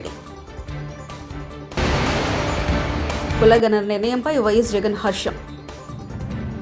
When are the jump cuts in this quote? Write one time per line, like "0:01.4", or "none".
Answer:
0:01.7
0:03.3

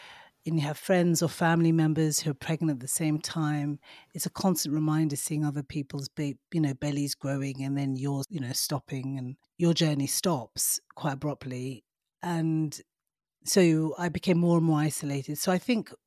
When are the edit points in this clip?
0:08.3
0:09.4

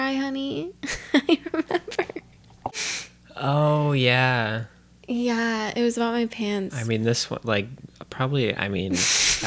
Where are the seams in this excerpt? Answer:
0:02.8

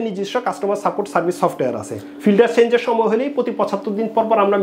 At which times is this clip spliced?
none

